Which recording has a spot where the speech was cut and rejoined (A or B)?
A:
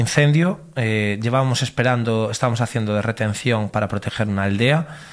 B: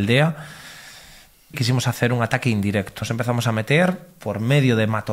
B